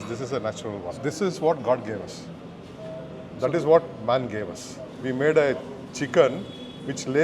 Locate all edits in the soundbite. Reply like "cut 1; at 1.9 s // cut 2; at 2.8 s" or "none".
none